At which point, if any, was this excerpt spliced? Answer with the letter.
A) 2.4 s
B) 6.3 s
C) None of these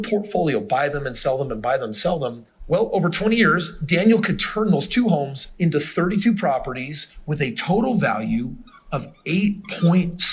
A